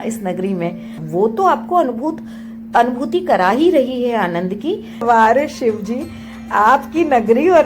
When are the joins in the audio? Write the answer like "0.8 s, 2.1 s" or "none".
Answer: 1.0 s, 5.0 s